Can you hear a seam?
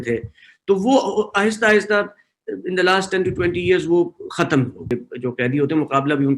yes; 1 cut; at 5.1 s

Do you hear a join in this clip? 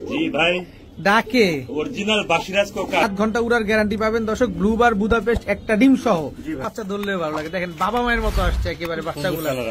yes; 2 cuts; at 3.0 s, 6.6 s

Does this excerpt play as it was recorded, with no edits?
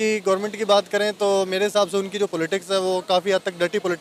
yes; 0 cuts

